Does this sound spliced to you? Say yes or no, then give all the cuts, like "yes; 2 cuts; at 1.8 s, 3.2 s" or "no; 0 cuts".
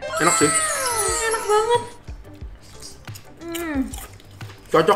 no; 0 cuts